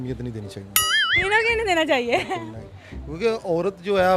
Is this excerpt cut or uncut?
uncut